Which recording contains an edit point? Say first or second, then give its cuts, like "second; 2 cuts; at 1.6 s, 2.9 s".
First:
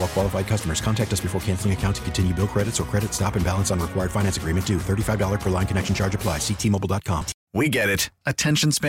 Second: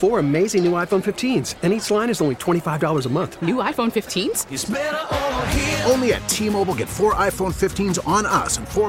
first; 1 cut; at 7.4 s